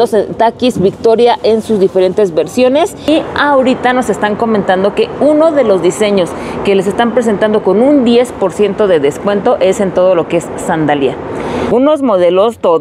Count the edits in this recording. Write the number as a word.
two